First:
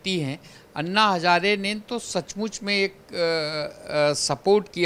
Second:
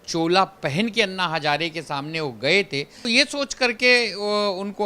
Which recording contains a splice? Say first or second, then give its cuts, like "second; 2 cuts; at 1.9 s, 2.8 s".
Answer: second; 1 cut; at 3.0 s